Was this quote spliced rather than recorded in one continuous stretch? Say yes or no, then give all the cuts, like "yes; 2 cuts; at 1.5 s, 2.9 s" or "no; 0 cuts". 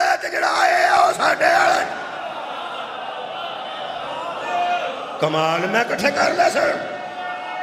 no; 0 cuts